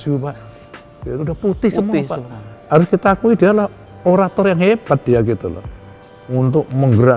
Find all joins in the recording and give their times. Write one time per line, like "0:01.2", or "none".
0:02.5

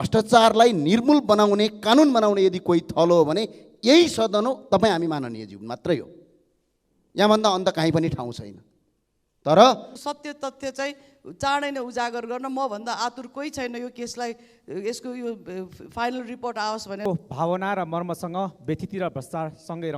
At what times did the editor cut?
0:09.9
0:17.1

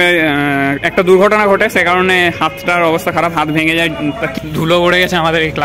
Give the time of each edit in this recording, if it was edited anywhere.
0:04.4

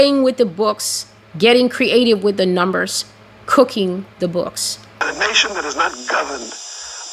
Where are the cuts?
0:05.0

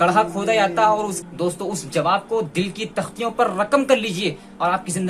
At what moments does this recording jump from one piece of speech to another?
0:01.2

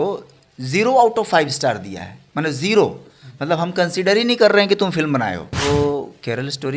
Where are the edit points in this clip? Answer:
0:05.6

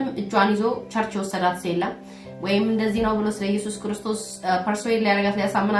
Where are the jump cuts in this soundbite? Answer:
none

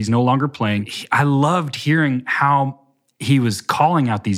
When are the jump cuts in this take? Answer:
0:01.0

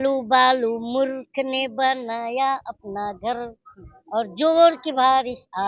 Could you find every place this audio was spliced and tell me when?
none

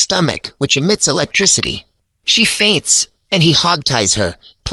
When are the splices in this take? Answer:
none

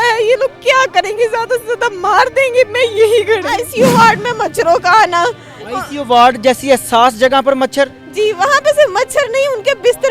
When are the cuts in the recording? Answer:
0:03.7

